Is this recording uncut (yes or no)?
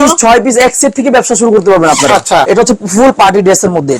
no